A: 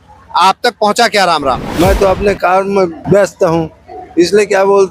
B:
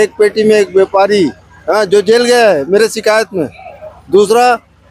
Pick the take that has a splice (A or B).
A